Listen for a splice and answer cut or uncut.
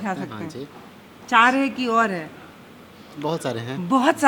uncut